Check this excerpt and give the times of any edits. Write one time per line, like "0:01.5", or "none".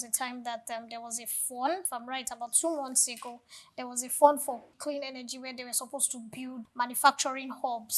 0:01.8
0:04.7
0:06.6